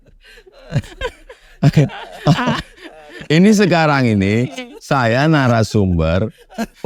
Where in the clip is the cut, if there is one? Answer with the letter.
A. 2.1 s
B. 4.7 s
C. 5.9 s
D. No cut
D